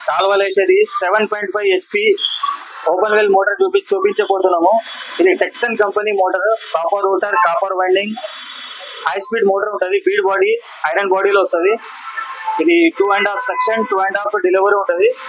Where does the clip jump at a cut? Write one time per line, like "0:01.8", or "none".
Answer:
none